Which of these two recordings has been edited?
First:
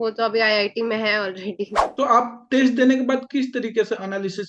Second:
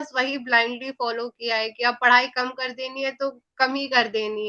first; 1 cut; at 1.8 s

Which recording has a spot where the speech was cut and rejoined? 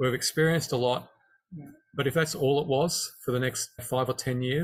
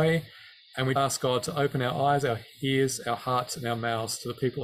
second; 1 cut; at 1.0 s

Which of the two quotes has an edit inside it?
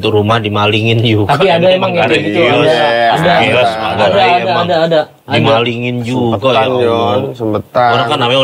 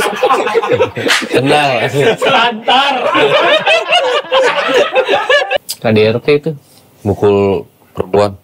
second; 1 cut; at 5.5 s

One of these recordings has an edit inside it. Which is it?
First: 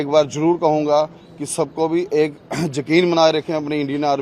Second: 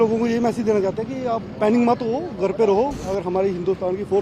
second; 1 cut; at 3.0 s

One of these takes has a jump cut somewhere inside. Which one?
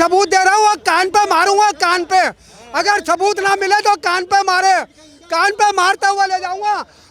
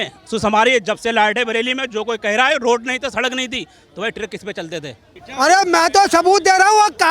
second; 1 cut; at 5.1 s

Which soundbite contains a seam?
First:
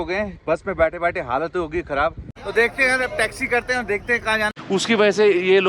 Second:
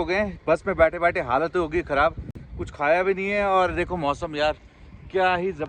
first; 2 cuts; at 2.3 s, 4.5 s

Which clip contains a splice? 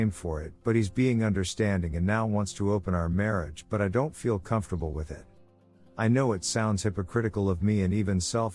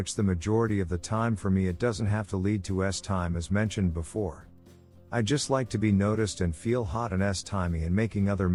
first; 1 cut; at 5.5 s

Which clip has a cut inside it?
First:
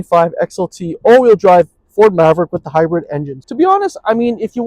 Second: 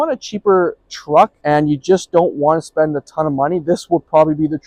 first; 1 cut; at 3.5 s

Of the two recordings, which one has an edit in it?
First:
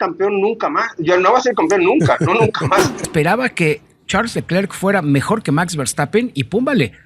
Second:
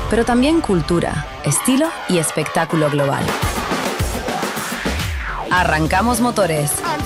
first; 1 cut; at 3.0 s

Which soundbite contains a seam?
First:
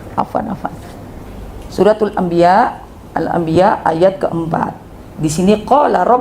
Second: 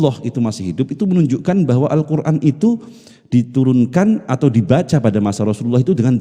first; 1 cut; at 1.2 s

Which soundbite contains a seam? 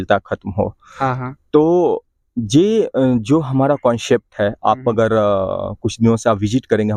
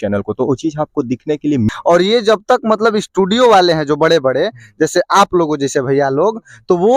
second; 1 cut; at 1.7 s

